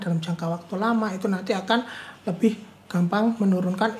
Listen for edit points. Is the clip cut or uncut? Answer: uncut